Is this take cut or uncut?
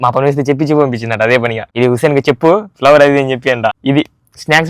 cut